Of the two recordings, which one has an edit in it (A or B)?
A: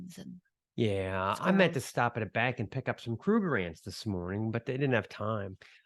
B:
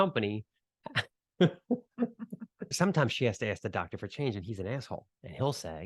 B